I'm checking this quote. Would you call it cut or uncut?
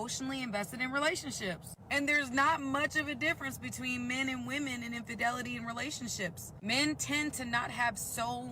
cut